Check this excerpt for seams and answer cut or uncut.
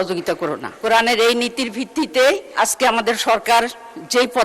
cut